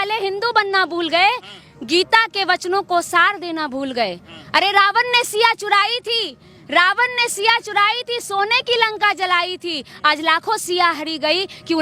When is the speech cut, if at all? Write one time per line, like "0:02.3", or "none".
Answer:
none